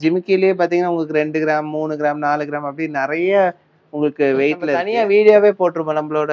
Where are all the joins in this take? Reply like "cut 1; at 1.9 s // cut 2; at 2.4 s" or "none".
cut 1; at 4.8 s